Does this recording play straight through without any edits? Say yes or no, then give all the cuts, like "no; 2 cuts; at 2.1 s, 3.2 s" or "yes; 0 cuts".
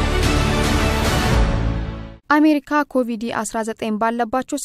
yes; 0 cuts